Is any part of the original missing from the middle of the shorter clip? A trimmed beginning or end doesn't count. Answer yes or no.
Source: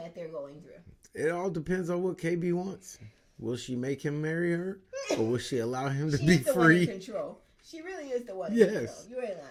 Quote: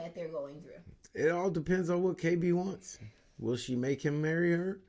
no